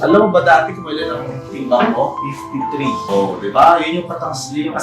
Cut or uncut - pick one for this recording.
cut